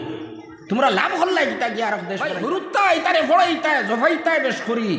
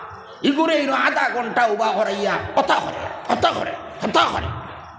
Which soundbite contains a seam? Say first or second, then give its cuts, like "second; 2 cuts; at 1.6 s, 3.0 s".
first; 1 cut; at 2.3 s